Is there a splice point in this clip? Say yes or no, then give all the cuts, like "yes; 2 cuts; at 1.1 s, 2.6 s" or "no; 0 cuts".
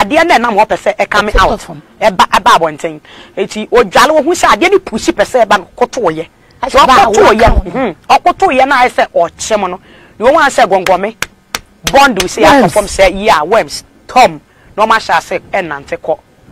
no; 0 cuts